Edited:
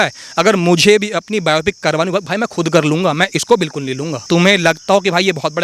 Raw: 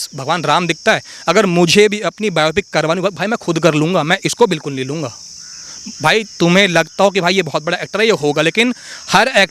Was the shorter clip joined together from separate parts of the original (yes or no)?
yes